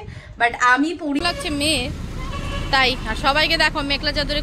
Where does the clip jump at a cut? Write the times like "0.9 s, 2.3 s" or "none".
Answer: 1.2 s